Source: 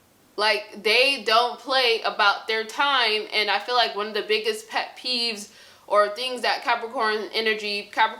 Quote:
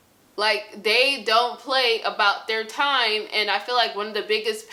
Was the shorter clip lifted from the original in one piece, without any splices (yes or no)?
yes